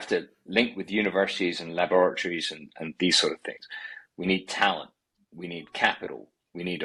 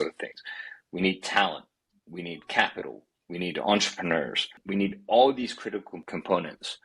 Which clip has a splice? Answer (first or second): second